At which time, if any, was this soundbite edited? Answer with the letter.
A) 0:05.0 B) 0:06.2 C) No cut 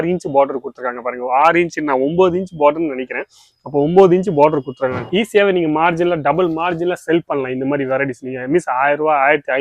A